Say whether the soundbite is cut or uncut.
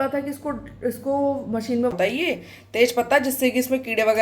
cut